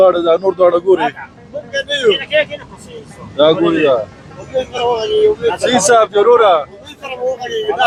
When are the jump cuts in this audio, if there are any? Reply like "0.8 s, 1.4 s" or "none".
none